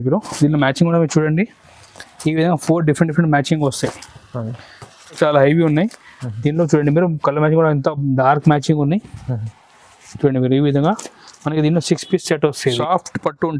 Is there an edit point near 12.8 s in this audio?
yes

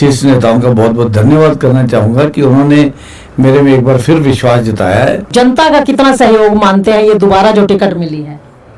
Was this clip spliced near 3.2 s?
no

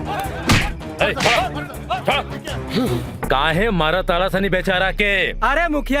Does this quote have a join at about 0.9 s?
no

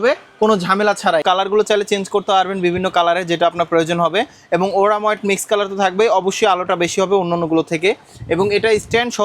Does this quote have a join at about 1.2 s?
yes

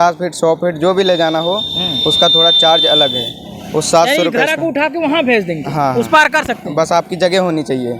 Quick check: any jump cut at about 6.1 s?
no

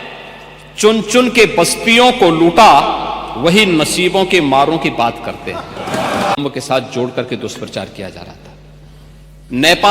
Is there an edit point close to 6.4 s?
yes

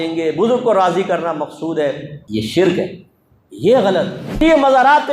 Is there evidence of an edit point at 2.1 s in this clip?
yes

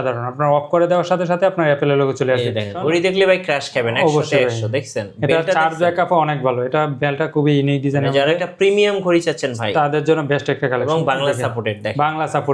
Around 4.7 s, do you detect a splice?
no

